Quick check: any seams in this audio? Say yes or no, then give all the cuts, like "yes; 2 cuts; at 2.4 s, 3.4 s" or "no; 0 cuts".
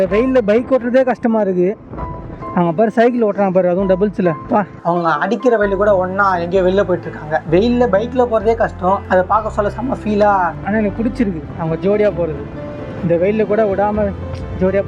yes; 2 cuts; at 4.7 s, 10.5 s